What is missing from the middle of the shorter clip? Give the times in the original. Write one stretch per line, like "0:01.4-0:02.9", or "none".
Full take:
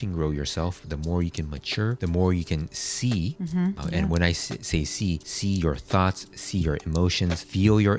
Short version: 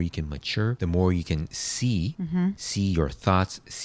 0:03.8-0:05.3